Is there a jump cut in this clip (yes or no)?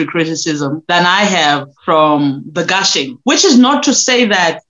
yes